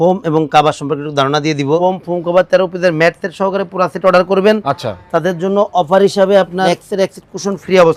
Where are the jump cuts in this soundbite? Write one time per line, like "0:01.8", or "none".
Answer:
0:01.8
0:06.7